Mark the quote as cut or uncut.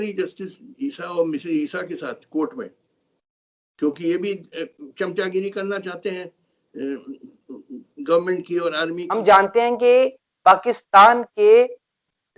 cut